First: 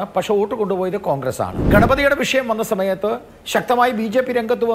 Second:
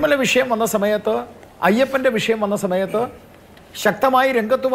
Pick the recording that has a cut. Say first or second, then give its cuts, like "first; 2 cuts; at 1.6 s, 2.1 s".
first; 1 cut; at 1.6 s